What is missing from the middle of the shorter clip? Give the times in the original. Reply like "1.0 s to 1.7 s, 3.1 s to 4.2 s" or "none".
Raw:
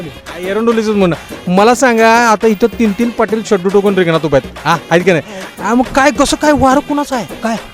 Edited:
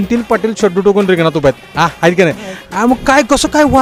none